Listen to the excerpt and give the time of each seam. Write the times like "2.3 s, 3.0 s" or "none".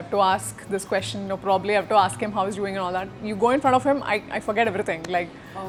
none